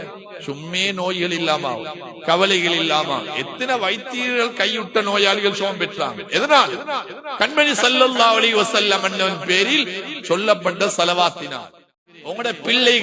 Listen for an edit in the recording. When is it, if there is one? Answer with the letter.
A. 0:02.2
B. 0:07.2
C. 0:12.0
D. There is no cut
C